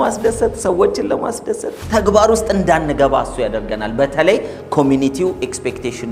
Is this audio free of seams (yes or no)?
yes